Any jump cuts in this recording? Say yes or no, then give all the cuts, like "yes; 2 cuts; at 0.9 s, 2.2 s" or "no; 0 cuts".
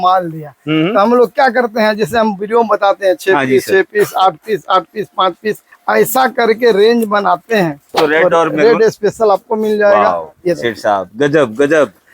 yes; 2 cuts; at 5.7 s, 7.9 s